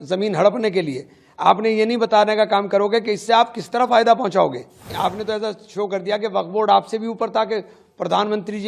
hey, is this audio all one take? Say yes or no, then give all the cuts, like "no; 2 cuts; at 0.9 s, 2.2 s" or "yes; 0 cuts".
no; 1 cut; at 4.9 s